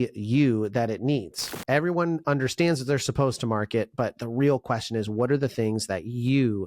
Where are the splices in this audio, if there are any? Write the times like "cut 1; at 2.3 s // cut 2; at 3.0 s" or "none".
cut 1; at 1.6 s